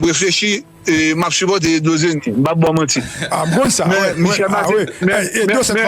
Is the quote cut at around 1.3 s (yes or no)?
yes